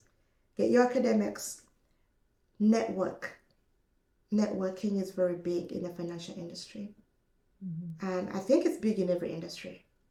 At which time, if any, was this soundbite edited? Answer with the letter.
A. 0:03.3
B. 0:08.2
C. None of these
C